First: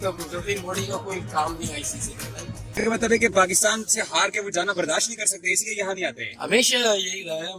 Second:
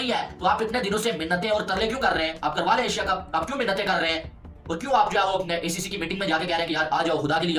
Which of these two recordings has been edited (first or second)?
first